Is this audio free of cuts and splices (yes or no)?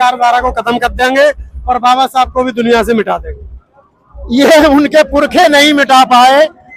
yes